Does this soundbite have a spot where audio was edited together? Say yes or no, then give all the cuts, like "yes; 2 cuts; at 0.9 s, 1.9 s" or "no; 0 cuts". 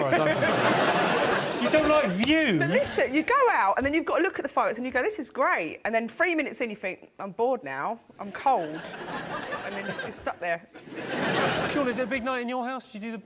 no; 0 cuts